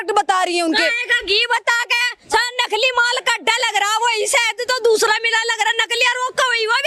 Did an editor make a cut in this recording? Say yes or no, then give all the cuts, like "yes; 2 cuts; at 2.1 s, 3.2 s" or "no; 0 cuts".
no; 0 cuts